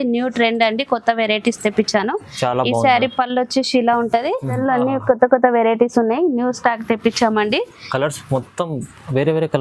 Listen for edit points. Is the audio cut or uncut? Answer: cut